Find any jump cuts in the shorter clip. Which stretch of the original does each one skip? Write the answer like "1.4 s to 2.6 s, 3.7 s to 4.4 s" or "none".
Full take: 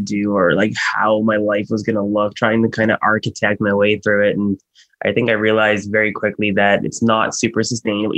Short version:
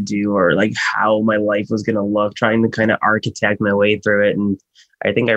none